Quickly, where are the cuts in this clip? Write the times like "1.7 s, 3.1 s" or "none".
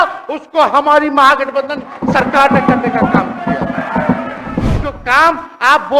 4.6 s